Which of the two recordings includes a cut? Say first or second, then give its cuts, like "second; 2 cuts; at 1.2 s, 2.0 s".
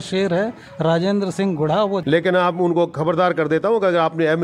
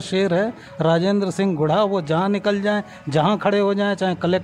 first; 1 cut; at 2.0 s